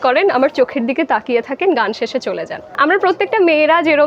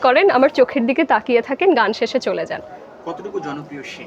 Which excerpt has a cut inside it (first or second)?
first